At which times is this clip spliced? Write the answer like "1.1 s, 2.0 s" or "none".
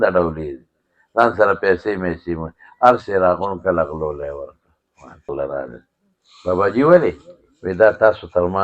5.2 s